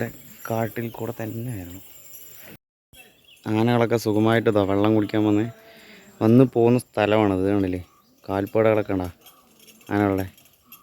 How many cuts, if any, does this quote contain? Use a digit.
1